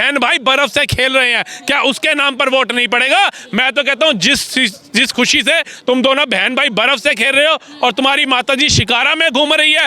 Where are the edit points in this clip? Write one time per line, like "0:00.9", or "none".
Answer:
none